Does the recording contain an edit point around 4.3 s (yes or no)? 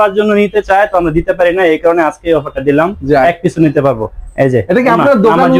no